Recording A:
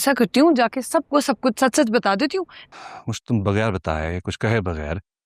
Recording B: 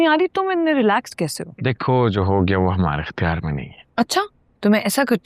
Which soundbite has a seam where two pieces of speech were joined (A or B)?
A